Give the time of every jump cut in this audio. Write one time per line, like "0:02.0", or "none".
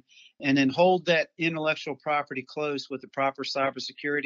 none